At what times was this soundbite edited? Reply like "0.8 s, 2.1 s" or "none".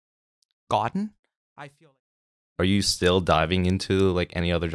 2.2 s